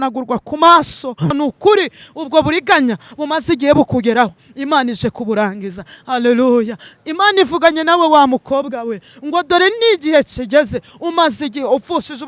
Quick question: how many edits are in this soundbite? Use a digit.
1